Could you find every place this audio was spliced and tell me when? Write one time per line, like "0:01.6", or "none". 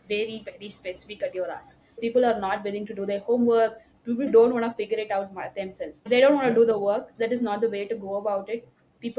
0:02.0
0:04.3
0:06.1
0:07.1